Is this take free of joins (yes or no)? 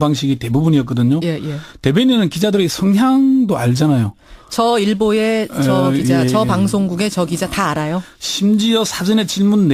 no